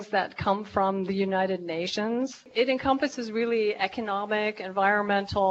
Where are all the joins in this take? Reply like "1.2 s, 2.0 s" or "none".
2.5 s